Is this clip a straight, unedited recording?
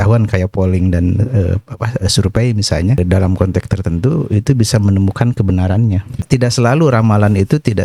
no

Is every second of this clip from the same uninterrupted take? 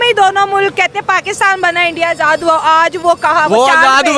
yes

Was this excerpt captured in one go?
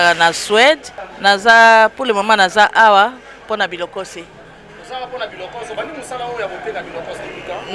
yes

